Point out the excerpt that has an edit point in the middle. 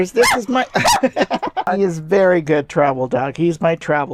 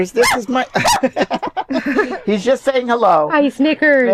first; 1 cut; at 1.7 s

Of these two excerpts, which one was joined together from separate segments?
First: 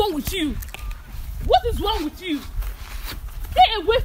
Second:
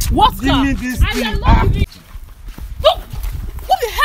second; 1 cut; at 2.0 s

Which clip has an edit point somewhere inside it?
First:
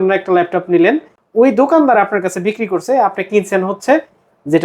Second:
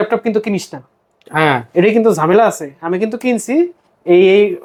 first; 1 cut; at 1.2 s

